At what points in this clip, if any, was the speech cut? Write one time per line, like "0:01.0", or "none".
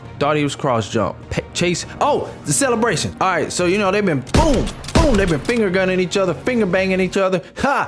none